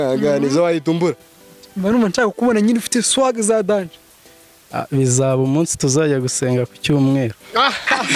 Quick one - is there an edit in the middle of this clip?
yes; 1 cut; at 1.3 s

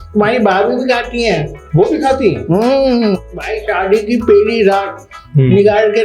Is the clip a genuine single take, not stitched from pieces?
no; 1 cut; at 3.5 s

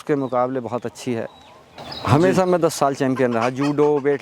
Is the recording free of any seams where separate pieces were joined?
no; 1 cut; at 1.9 s

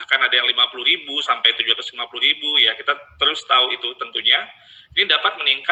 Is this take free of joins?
yes; 0 cuts

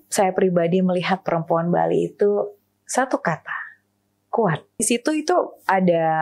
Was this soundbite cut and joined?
yes; 1 cut; at 4.8 s

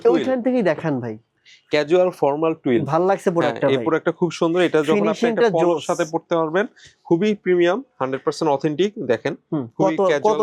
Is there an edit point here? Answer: no; 0 cuts

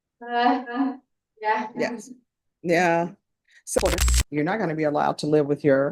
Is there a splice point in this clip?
yes; 1 cut; at 3.8 s

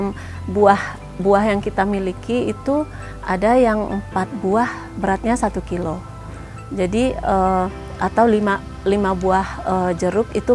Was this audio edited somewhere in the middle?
no; 0 cuts

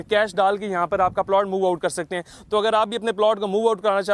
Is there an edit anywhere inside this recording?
no; 0 cuts

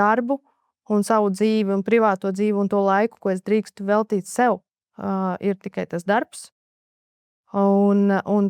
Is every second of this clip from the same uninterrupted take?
yes; 0 cuts

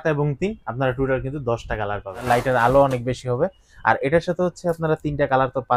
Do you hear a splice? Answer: yes; 1 cut; at 2.1 s

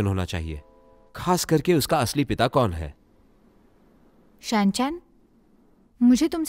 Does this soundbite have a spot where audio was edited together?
yes; 1 cut; at 4.4 s

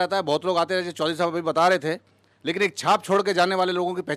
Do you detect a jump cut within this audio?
no; 0 cuts

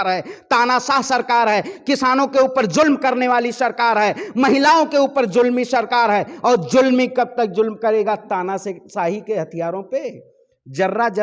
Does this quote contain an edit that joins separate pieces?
no; 0 cuts

